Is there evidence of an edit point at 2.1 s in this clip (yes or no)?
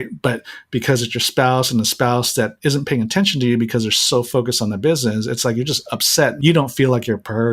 no